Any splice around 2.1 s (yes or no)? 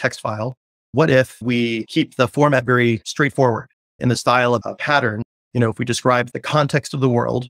no